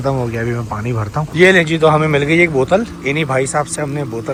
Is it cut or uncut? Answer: uncut